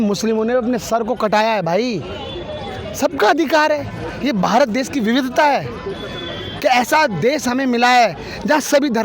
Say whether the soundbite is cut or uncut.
uncut